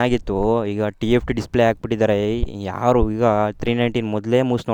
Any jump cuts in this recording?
no; 0 cuts

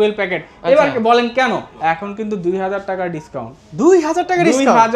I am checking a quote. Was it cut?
yes; 1 cut; at 1.7 s

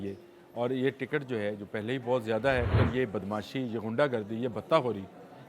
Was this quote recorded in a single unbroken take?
no; 1 cut; at 2.7 s

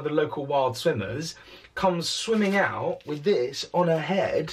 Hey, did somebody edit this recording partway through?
no; 0 cuts

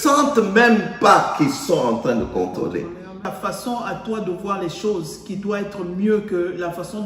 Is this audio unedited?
no; 1 cut; at 3.2 s

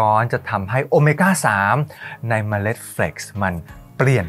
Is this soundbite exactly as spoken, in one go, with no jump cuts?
yes; 0 cuts

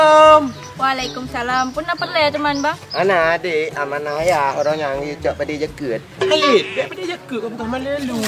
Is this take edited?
no; 0 cuts

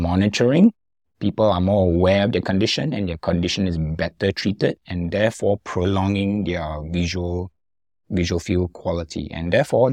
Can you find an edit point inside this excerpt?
no; 0 cuts

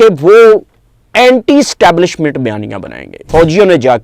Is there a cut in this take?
yes; 1 cut; at 3.1 s

